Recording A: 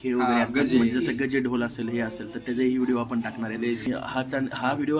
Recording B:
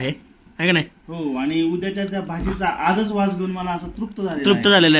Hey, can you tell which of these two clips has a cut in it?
A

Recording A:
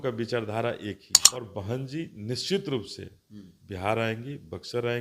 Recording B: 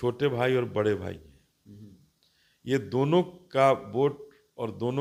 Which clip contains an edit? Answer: A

